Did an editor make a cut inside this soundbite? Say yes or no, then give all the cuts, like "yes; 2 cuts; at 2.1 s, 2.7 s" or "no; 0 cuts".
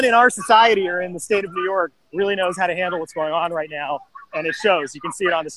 no; 0 cuts